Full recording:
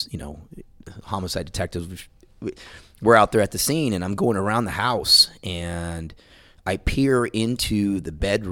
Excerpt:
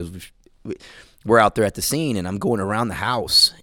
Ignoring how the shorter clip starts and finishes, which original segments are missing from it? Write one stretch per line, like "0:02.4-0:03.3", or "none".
none